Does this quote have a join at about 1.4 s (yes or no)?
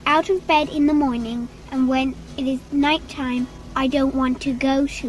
no